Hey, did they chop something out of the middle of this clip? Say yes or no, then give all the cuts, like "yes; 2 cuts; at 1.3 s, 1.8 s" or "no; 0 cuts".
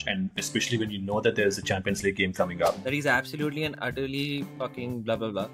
yes; 1 cut; at 2.8 s